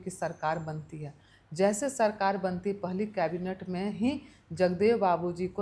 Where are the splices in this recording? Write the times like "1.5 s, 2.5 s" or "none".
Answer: none